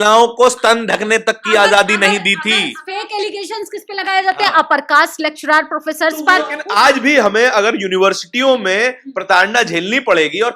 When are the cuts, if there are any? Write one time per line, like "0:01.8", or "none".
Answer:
0:02.8
0:06.6